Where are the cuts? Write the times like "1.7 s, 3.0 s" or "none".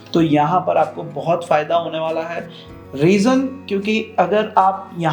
none